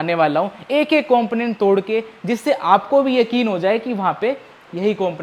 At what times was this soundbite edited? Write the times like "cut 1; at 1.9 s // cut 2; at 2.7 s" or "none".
none

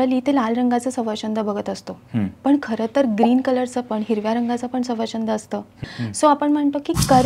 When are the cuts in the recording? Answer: cut 1; at 5.7 s

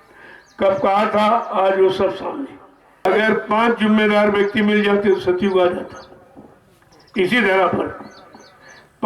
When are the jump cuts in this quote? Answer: cut 1; at 3.0 s

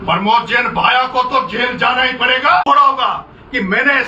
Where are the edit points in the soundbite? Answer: cut 1; at 2.6 s

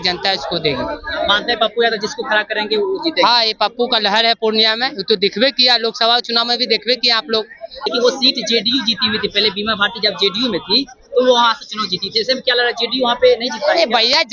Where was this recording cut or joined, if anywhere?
cut 1; at 7.7 s

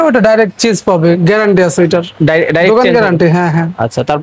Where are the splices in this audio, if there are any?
none

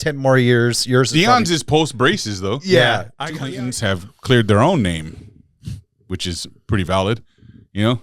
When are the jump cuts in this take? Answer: cut 1; at 3.1 s

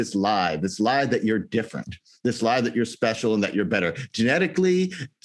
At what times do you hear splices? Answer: none

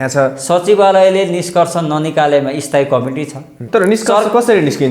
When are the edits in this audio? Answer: cut 1; at 3.6 s

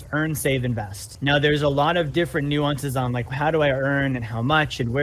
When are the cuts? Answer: cut 1; at 1.1 s // cut 2; at 3.3 s

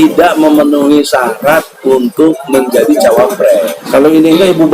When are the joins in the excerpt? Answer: cut 1; at 3.8 s

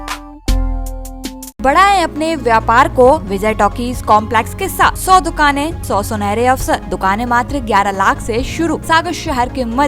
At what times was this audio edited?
cut 1; at 1.6 s // cut 2; at 3.3 s // cut 3; at 5.0 s // cut 4; at 5.8 s // cut 5; at 6.9 s // cut 6; at 8.8 s

